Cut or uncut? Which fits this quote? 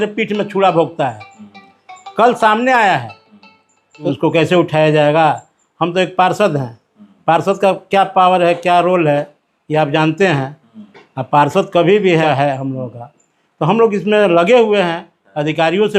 cut